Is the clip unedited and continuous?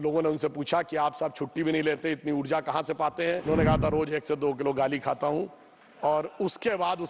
no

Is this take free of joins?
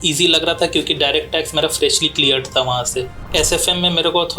no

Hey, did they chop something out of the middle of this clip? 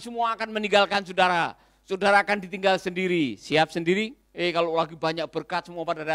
yes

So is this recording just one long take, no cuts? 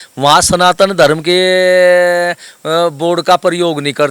yes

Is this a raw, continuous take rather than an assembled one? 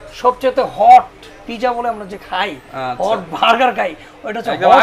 yes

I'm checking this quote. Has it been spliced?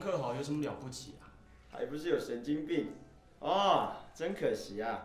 no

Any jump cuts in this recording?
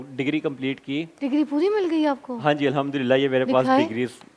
no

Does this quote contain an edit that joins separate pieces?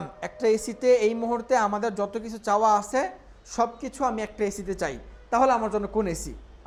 no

